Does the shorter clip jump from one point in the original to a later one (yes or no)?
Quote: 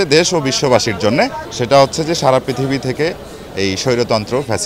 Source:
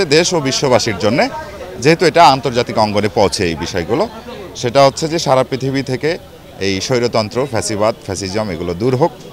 yes